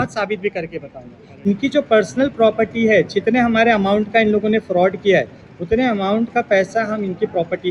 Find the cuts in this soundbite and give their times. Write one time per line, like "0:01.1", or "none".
0:01.5